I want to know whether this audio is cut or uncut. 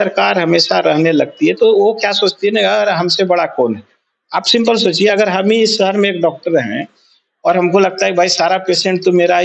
uncut